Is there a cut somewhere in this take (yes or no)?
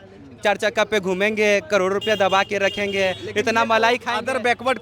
no